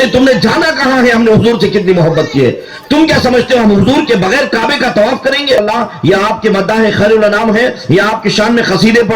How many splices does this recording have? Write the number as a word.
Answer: one